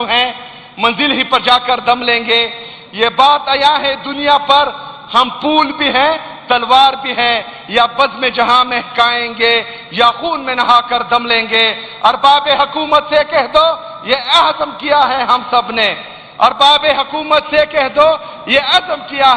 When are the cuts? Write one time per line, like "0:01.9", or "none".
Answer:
none